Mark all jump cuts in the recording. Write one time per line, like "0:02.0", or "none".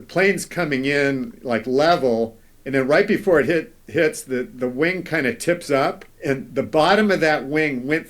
0:06.1